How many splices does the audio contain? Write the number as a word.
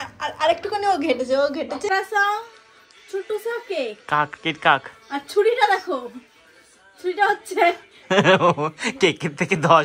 one